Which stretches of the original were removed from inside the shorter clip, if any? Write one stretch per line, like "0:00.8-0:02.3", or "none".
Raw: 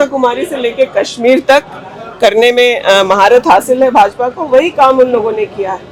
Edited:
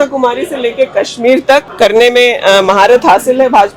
0:01.7-0:02.1